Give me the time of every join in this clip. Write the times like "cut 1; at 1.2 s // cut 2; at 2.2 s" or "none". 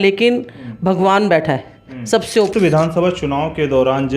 cut 1; at 2.5 s